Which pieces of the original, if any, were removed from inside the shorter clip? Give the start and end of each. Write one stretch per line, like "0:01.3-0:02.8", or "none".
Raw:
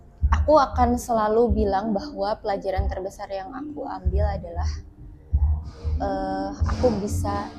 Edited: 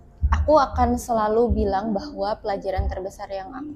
none